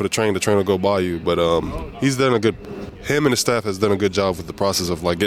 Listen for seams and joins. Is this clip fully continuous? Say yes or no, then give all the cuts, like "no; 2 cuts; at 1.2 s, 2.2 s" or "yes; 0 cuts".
yes; 0 cuts